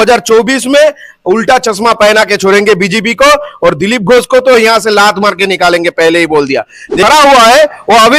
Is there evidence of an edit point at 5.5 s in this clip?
no; 1 cut; at 7.0 s

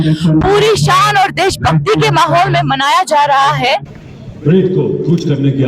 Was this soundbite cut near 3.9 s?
yes; 1 cut; at 3.9 s

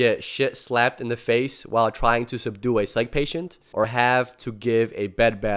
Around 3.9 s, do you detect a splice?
yes; 1 cut; at 3.9 s

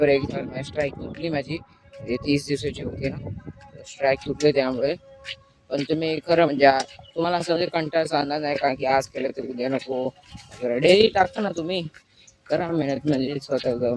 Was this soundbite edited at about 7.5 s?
no; 0 cuts

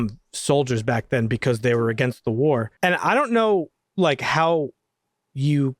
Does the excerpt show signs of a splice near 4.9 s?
no; 1 cut; at 2.7 s

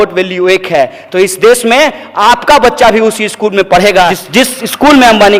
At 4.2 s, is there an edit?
yes; 1 cut; at 4.2 s

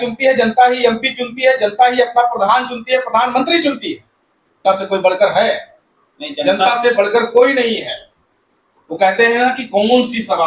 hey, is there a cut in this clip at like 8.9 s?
no; 1 cut; at 4.6 s

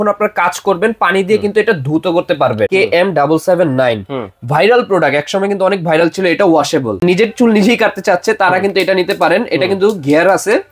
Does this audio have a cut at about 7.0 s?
yes; 2 cuts; at 2.7 s, 7.0 s

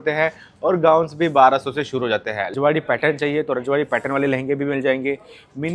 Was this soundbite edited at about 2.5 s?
yes; 1 cut; at 2.5 s

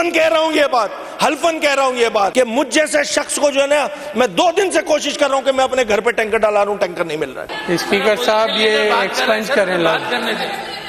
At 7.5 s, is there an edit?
yes; 2 cuts; at 2.3 s, 7.5 s

